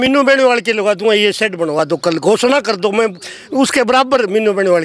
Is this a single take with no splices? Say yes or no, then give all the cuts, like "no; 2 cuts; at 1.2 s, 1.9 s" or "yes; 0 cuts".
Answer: yes; 0 cuts